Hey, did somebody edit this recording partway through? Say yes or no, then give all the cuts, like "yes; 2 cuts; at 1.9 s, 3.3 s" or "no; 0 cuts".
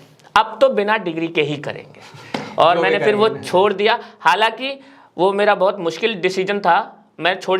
no; 0 cuts